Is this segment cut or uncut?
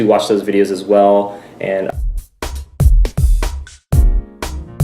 cut